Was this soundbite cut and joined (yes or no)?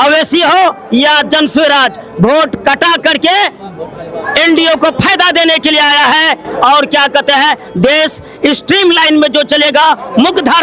no